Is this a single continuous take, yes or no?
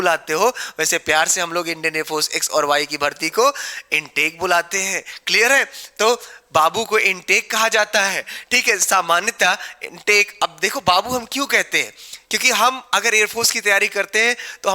yes